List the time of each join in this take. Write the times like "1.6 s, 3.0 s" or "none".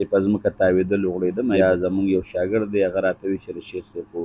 1.5 s